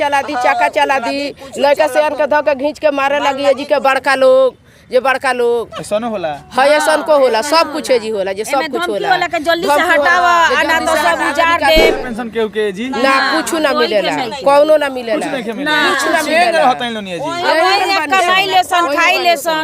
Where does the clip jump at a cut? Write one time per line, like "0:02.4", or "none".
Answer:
0:12.1